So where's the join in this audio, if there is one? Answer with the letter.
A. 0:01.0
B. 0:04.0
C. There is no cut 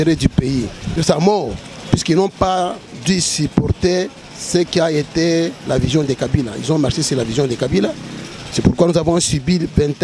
A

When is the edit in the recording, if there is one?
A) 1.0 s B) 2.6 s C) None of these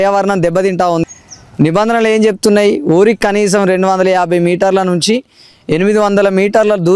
A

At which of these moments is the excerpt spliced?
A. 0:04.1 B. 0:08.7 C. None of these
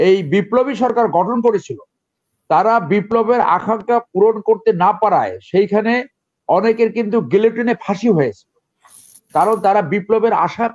C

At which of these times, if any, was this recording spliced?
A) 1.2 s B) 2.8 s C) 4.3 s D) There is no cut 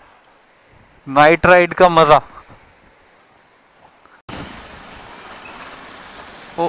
C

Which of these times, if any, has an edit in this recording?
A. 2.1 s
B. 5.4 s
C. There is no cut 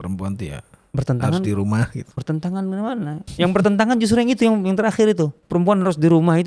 B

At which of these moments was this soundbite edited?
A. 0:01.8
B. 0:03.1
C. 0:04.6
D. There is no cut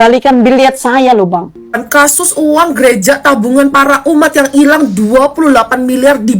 A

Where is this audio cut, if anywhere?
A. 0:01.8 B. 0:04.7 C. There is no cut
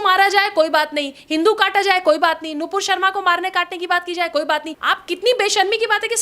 B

